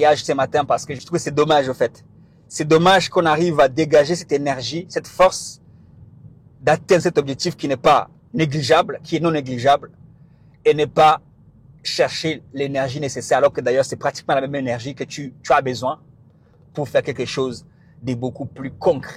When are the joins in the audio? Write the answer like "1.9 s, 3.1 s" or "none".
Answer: 1.0 s